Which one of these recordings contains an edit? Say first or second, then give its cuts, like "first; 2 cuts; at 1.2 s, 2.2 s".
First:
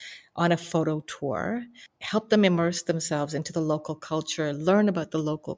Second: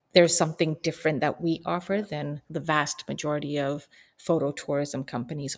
second; 1 cut; at 2.4 s